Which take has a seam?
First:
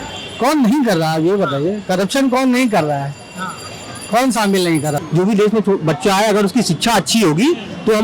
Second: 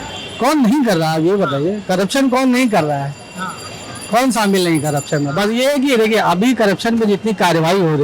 first; 1 cut; at 5.0 s

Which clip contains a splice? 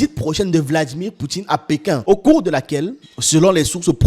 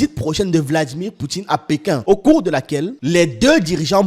second; 1 cut; at 3.0 s

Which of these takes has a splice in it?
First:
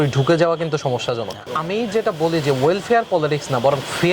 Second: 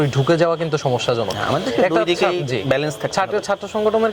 first; 1 cut; at 1.5 s

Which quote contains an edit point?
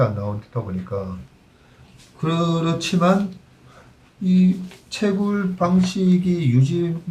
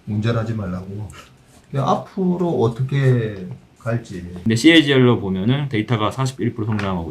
second; 1 cut; at 4.2 s

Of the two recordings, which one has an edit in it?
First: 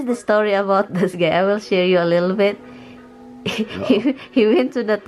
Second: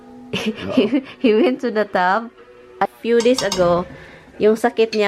second; 1 cut; at 2.9 s

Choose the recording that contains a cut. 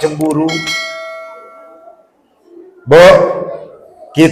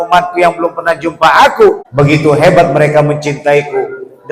second; 1 cut; at 1.8 s

